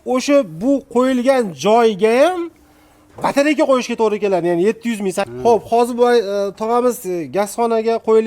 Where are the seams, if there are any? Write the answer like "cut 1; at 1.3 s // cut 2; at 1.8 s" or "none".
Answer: cut 1; at 5.3 s